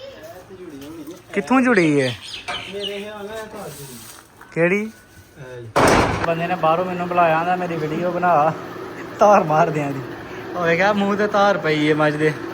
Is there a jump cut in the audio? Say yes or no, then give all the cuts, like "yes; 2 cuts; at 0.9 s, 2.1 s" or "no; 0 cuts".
yes; 1 cut; at 6.2 s